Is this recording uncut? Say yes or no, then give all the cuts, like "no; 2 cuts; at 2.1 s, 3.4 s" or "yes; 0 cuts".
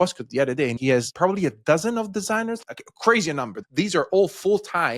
no; 3 cuts; at 1.0 s, 2.6 s, 3.6 s